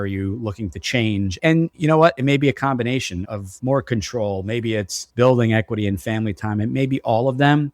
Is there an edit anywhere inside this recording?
yes; 1 cut; at 1.5 s

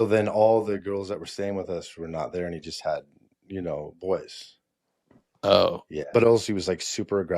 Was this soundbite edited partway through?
yes; 1 cut; at 6.0 s

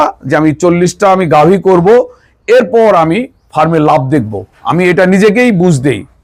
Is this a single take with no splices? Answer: yes; 0 cuts

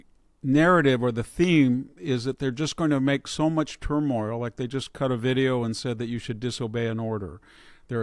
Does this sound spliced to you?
no; 0 cuts

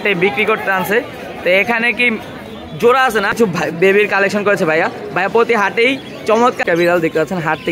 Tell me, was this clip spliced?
yes; 2 cuts; at 3.6 s, 6.6 s

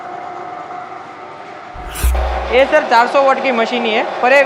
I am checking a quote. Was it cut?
yes; 1 cut; at 2.0 s

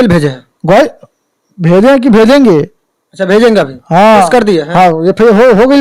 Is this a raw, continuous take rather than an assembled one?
yes; 0 cuts

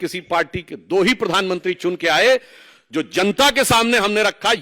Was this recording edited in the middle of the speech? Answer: no; 0 cuts

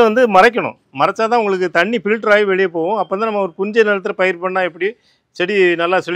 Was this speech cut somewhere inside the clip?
no; 0 cuts

